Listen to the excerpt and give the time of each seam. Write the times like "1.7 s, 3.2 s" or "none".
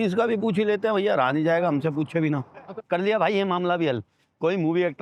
none

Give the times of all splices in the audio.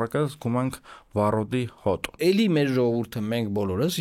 2.2 s

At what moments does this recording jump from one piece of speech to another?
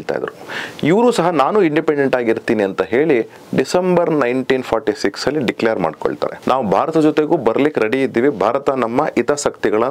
6.4 s

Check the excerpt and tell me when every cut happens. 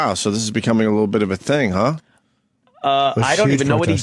none

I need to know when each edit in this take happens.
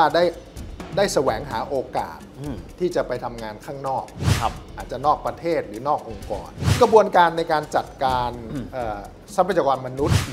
6.8 s

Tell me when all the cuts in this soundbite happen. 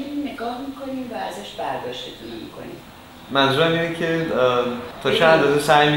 2.9 s, 4.9 s

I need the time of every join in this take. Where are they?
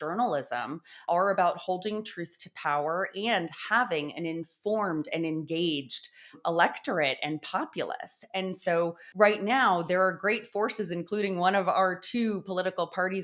1.0 s, 9.0 s

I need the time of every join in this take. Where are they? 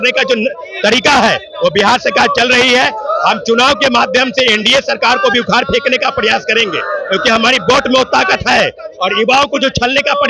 none

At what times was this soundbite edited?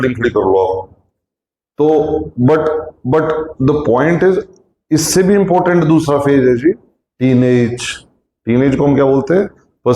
none

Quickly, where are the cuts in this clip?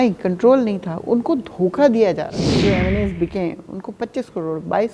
2.6 s

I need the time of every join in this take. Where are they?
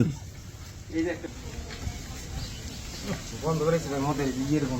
1.3 s

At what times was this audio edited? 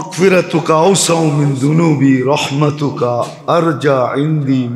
none

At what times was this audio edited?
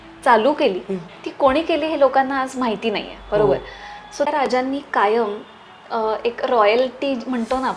4.5 s

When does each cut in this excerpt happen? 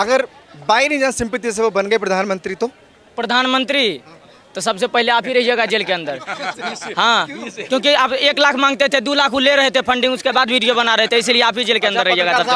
none

